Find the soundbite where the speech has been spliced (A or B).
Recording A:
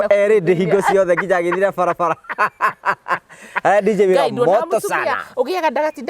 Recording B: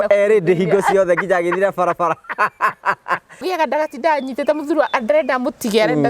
B